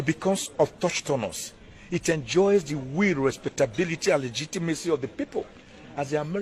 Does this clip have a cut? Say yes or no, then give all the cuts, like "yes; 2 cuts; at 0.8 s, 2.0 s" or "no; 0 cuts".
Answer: no; 0 cuts